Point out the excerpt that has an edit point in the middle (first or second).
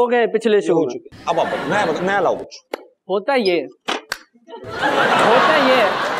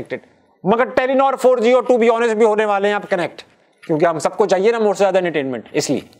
first